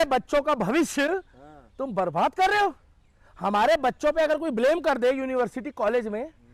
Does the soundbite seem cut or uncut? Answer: uncut